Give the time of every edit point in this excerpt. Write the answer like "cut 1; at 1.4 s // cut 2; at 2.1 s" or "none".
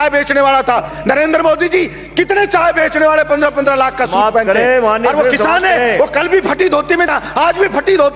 cut 1; at 0.9 s